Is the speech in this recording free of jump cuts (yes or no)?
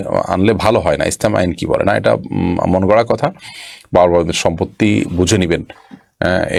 yes